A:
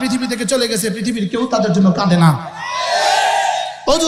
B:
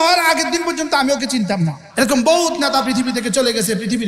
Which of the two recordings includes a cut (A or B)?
B